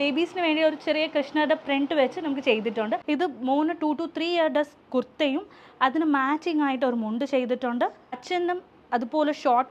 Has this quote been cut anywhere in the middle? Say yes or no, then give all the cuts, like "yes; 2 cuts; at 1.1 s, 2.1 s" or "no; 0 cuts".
yes; 1 cut; at 3.0 s